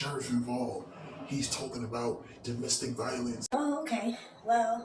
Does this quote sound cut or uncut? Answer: cut